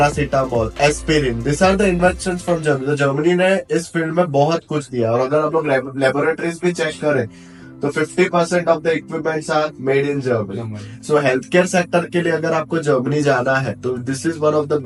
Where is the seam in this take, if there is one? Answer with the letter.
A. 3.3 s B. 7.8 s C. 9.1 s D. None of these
D